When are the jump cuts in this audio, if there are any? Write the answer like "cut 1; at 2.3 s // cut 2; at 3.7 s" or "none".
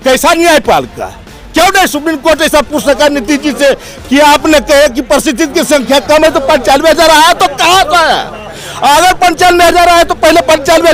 none